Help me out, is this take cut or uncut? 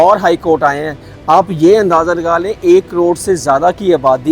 uncut